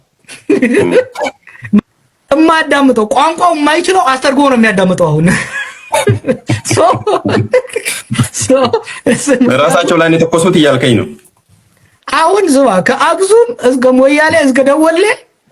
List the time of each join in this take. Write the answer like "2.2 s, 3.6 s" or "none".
1.8 s